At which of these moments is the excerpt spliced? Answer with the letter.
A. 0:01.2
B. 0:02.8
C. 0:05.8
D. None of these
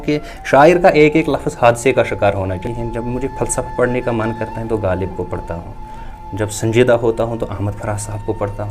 B